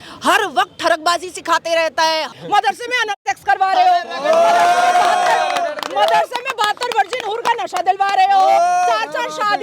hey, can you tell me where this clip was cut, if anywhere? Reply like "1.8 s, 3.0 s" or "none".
2.3 s